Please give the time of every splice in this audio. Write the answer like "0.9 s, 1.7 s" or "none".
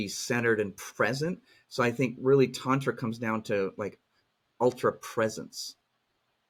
none